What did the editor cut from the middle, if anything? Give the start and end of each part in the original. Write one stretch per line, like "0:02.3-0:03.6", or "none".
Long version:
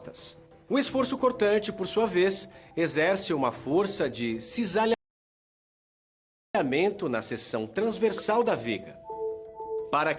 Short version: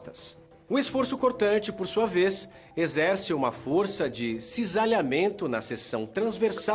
0:04.9-0:06.5